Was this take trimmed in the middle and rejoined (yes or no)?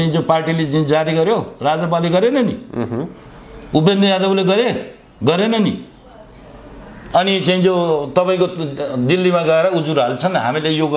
no